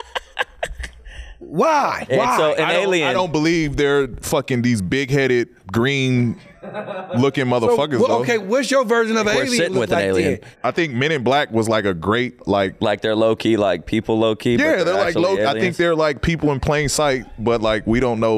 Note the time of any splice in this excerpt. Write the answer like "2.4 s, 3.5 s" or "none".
2.0 s, 10.5 s, 12.3 s